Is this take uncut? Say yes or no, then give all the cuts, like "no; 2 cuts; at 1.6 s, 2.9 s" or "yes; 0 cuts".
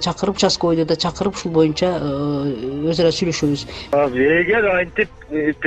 no; 1 cut; at 3.9 s